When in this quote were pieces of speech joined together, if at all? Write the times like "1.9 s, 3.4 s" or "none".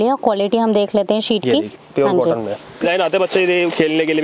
1.8 s, 2.8 s

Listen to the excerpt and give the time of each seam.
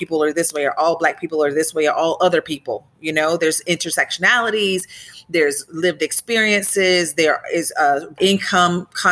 8.2 s

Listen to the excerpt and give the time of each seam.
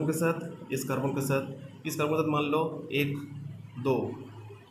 none

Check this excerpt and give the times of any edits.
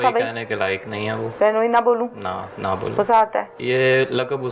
1.2 s, 3.5 s

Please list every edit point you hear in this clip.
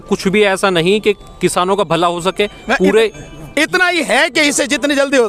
none

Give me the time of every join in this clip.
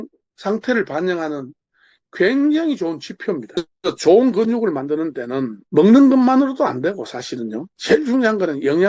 3.6 s, 7.7 s

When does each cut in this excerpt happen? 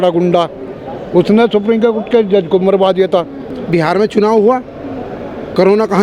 3.5 s

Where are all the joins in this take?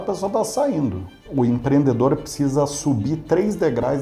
1.2 s

